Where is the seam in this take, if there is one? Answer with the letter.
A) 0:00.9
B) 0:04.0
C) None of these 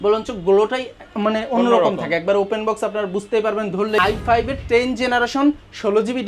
B